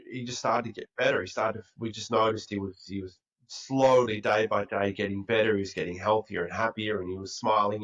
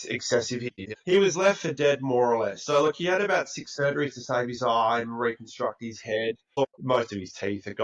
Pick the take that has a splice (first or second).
second